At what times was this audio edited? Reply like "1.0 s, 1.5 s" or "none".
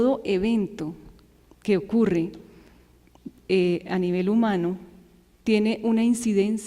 none